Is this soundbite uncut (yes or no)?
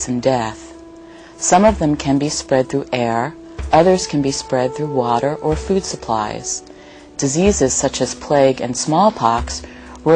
no